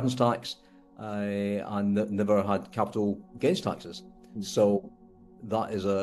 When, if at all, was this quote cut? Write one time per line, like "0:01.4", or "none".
none